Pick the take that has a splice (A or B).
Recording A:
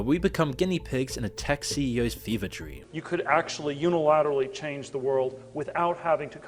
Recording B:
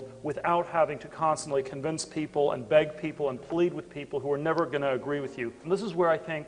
A